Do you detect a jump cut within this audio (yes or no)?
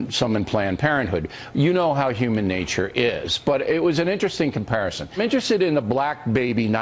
no